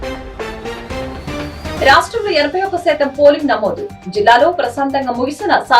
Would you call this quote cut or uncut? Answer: cut